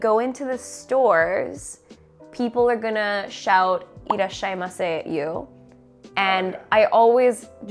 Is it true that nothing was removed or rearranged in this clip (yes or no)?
yes